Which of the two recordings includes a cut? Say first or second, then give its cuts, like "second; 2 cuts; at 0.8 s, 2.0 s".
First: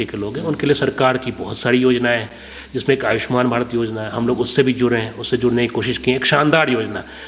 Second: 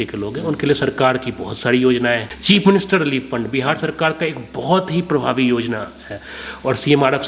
second; 1 cut; at 2.3 s